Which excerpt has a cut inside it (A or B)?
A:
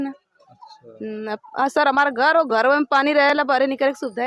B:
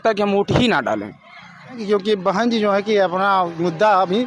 B